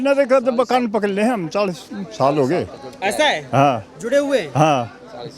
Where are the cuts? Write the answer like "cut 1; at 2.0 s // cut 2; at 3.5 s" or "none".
none